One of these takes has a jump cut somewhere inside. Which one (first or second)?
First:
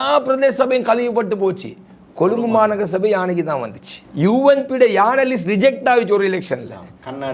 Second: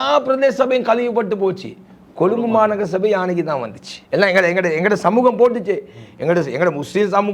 second